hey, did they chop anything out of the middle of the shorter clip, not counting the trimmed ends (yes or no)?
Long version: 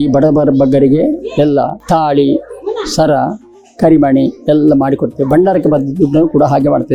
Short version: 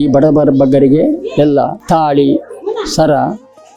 no